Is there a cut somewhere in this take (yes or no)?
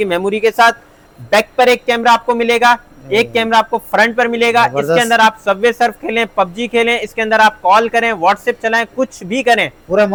no